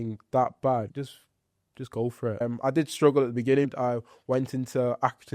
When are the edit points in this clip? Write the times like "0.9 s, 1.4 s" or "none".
0.9 s, 2.4 s, 3.7 s